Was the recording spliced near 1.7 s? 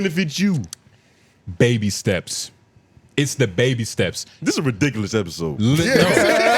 no; 0 cuts

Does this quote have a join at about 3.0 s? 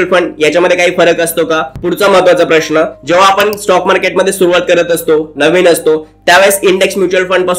no; 1 cut; at 1.7 s

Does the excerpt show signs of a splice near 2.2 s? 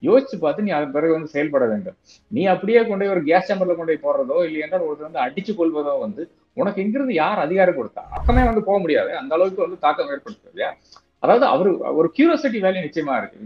no; 1 cut; at 8.1 s

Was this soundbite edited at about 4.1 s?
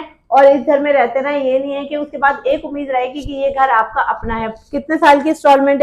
no; 0 cuts

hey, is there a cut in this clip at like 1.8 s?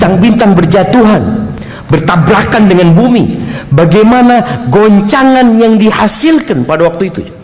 no; 0 cuts

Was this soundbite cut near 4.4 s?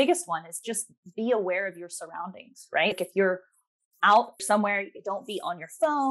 yes; 2 cuts; at 2.9 s, 4.4 s

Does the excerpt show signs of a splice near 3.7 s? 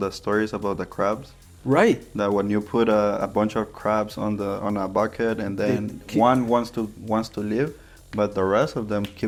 no; 0 cuts

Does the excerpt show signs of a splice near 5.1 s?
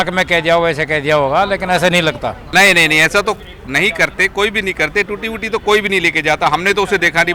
no; 1 cut; at 2.4 s

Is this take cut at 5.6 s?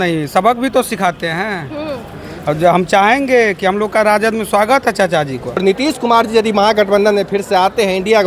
yes; 1 cut; at 5.6 s

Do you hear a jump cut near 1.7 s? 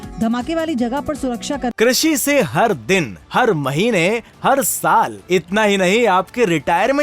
yes; 1 cut; at 1.7 s

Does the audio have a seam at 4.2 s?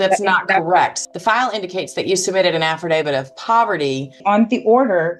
yes; 2 cuts; at 1.0 s, 4.2 s

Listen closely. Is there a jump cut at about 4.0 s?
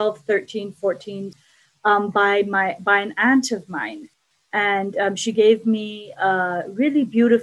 yes; 2 cuts; at 1.3 s, 4.0 s

